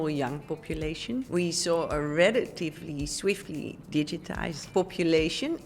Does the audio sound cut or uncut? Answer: cut